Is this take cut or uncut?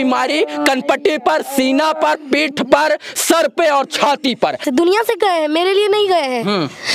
cut